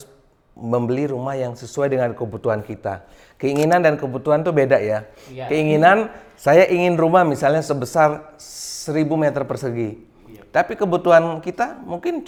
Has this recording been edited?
no; 0 cuts

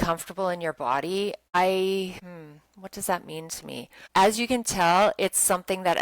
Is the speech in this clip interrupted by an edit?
yes; 3 cuts; at 1.6 s, 2.3 s, 3.9 s

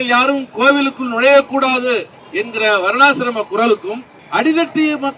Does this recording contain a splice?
yes; 2 cuts; at 2.2 s, 4.1 s

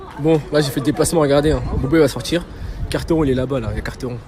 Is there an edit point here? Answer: no; 0 cuts

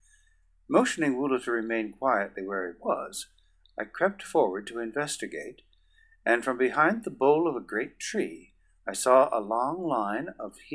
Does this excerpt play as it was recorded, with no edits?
no; 1 cut; at 2.4 s

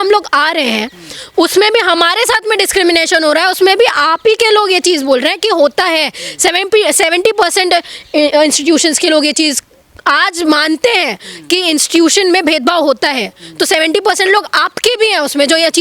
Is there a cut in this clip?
no; 0 cuts

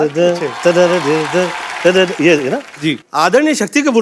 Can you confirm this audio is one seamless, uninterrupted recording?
no; 1 cut; at 3.0 s

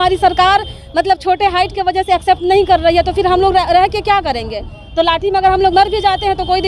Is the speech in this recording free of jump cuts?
yes; 0 cuts

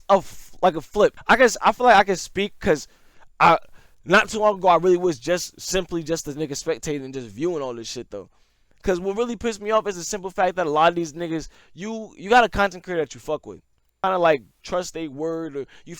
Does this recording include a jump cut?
yes; 2 cuts; at 1.2 s, 13.9 s

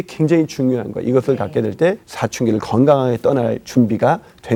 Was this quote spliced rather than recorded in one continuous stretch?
no; 0 cuts

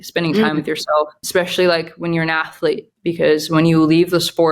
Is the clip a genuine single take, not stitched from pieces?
no; 1 cut; at 1.2 s

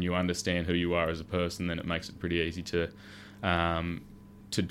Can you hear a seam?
no; 0 cuts

